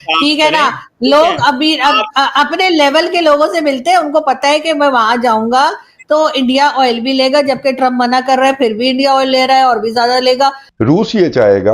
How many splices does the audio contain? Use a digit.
1